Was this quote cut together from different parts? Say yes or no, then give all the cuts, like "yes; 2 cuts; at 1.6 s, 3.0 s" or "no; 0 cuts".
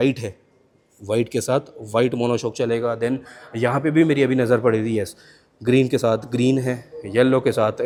no; 0 cuts